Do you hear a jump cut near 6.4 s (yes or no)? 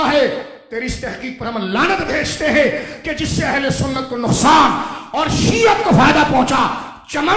no